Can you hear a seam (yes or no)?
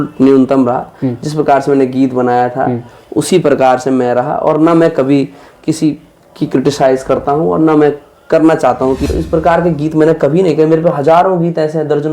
yes